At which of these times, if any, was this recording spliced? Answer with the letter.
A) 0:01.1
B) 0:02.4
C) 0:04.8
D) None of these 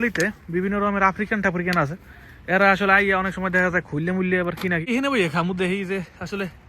C